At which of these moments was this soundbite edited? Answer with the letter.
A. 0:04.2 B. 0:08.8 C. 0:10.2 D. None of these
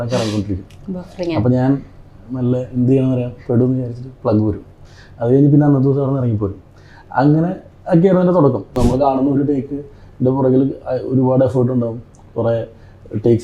B